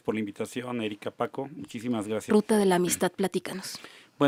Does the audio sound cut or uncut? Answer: uncut